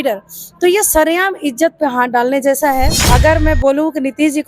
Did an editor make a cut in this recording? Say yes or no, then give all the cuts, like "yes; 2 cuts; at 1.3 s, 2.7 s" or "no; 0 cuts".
yes; 1 cut; at 3.0 s